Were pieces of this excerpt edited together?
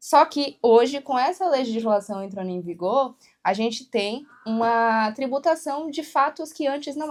no; 0 cuts

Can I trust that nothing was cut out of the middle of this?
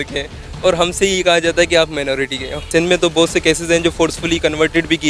no; 1 cut; at 2.7 s

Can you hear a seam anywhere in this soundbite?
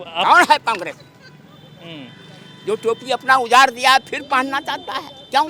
no; 0 cuts

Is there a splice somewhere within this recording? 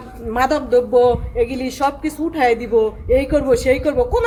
no; 0 cuts

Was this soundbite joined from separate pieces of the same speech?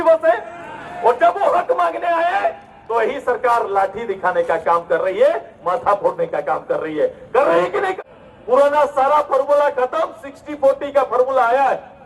yes; 1 cut; at 7.9 s

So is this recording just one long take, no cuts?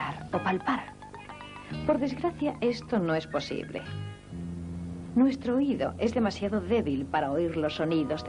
no; 1 cut; at 2.1 s

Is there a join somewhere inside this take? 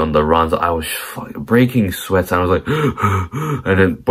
no; 0 cuts

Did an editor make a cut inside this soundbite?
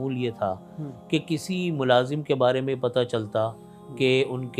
no; 0 cuts

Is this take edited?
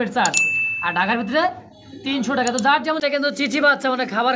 yes; 1 cut; at 3.0 s

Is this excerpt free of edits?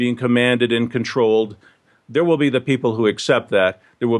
no; 1 cut; at 1.8 s

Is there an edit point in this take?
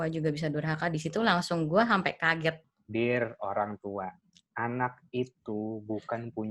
yes; 1 cut; at 2.6 s

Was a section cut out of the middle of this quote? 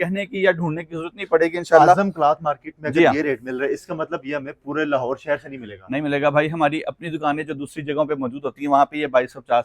no; 0 cuts

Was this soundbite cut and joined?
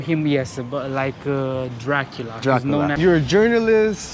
yes; 1 cut; at 2.9 s

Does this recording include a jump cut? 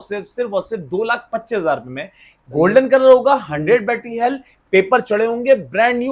no; 0 cuts

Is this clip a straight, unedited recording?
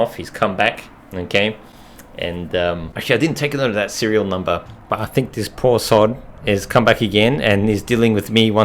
yes; 0 cuts

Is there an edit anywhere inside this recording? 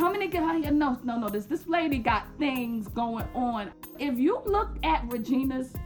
yes; 1 cut; at 3.9 s

